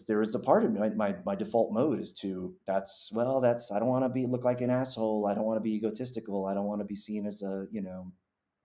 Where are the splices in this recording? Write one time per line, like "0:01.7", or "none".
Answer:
none